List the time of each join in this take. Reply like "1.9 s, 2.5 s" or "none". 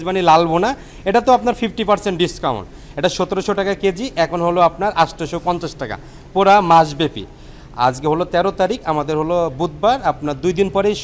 none